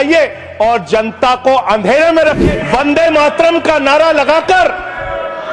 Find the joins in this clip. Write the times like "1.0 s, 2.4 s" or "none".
2.4 s